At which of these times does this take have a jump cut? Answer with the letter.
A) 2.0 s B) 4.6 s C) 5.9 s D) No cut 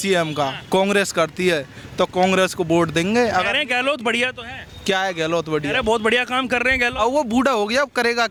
D